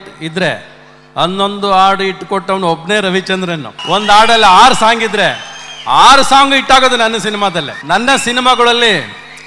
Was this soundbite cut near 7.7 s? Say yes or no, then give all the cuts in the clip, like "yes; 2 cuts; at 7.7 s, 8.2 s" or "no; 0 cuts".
yes; 2 cuts; at 3.7 s, 7.7 s